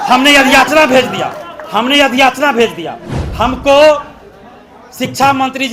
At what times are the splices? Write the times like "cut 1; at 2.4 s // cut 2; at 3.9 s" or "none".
none